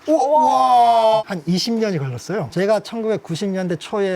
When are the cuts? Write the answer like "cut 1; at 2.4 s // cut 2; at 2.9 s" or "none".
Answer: cut 1; at 1.3 s // cut 2; at 2.5 s